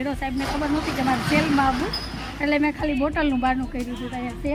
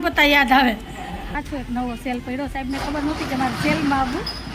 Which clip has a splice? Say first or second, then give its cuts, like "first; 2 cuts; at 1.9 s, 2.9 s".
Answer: second; 1 cut; at 1.3 s